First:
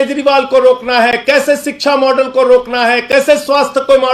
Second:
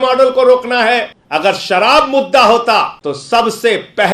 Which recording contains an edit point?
second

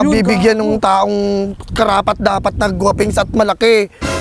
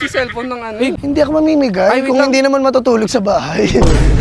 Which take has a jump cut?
second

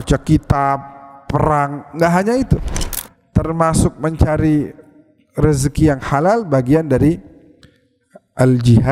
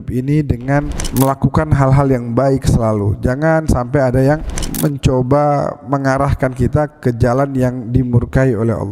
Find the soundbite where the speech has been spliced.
second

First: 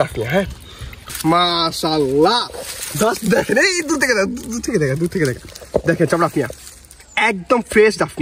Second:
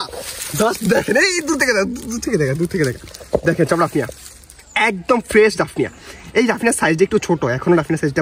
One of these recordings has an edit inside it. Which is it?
first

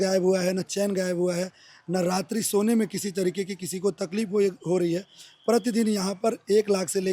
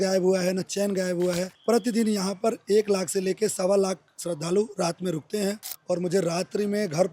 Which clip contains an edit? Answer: second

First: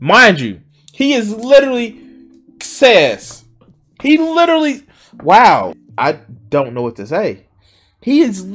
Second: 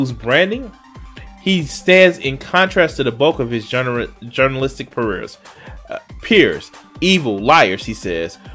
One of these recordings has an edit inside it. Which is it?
first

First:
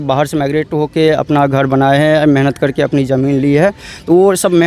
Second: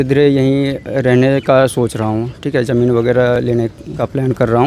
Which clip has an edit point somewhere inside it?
second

